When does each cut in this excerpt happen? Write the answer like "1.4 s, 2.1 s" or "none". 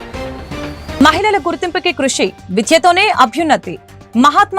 1.0 s